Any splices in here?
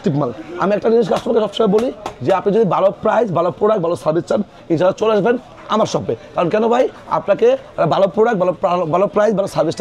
no; 0 cuts

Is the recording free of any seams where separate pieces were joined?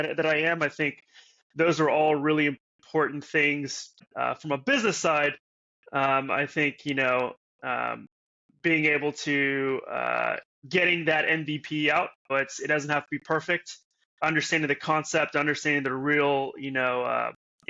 no; 3 cuts; at 4.0 s, 10.6 s, 12.3 s

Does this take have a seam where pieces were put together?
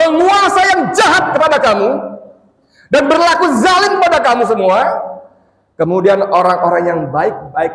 no; 0 cuts

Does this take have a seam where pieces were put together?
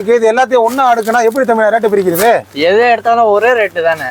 no; 0 cuts

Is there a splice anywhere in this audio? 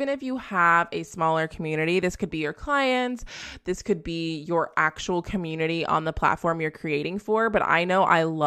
no; 0 cuts

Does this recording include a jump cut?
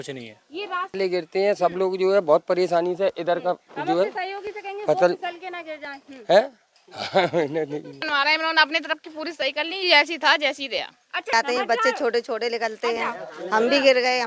yes; 3 cuts; at 1.0 s, 8.1 s, 11.3 s

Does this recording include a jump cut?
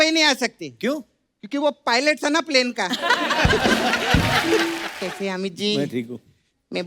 yes; 1 cut; at 4.9 s

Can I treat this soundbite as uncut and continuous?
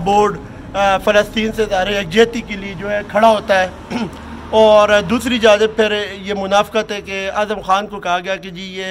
yes; 0 cuts

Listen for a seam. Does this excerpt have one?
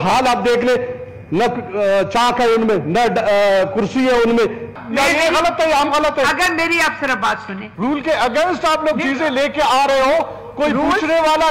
yes; 2 cuts; at 4.8 s, 7.6 s

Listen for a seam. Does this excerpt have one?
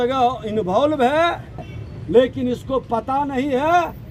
yes; 1 cut; at 1.6 s

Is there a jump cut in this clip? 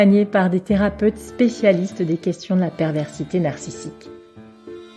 no; 0 cuts

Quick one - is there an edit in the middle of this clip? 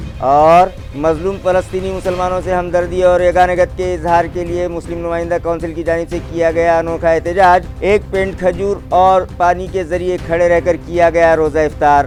no; 0 cuts

